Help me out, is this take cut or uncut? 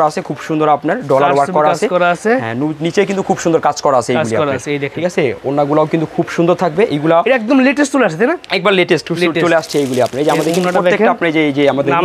uncut